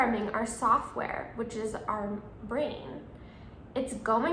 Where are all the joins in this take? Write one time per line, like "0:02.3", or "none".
none